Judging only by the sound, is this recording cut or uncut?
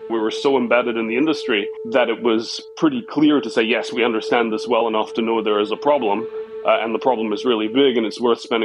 uncut